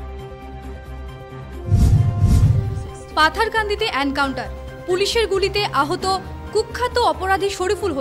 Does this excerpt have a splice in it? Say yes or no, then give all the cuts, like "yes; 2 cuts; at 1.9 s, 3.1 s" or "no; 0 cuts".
yes; 1 cut; at 2.3 s